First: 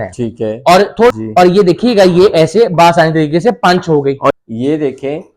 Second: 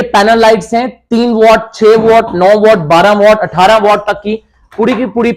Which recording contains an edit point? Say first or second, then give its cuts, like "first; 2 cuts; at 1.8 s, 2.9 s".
first; 2 cuts; at 1.1 s, 4.3 s